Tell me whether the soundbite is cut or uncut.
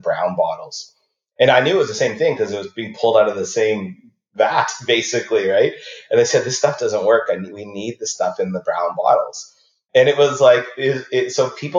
uncut